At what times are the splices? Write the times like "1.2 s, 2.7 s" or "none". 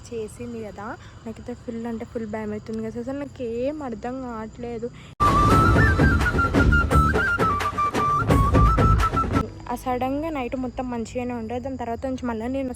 9.6 s

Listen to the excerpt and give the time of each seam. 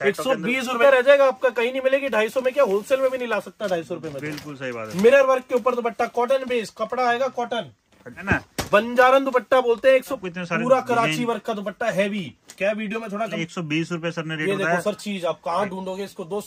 0.8 s, 4.9 s, 8.2 s, 10.2 s, 13.4 s

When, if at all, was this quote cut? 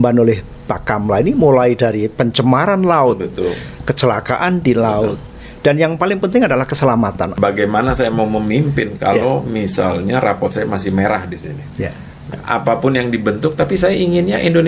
7.3 s, 12.4 s

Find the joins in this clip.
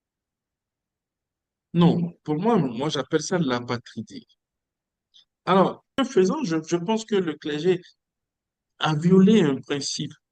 5.8 s

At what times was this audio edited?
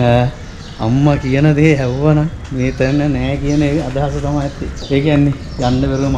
4.7 s

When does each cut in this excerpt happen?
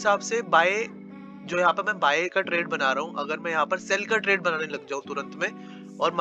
none

